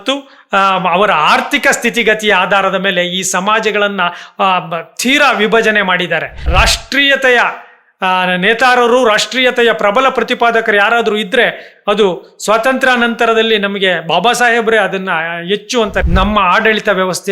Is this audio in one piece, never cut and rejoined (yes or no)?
no